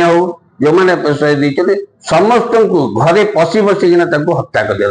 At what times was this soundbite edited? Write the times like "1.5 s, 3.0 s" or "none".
none